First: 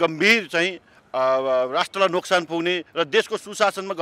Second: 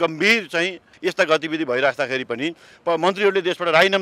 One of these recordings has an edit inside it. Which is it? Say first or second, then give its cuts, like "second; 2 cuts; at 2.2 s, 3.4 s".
second; 1 cut; at 0.9 s